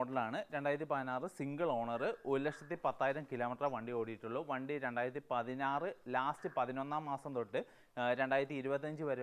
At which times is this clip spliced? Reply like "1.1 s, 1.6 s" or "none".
none